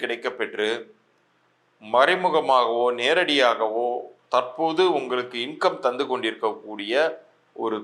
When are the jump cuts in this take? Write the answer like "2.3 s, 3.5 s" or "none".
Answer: none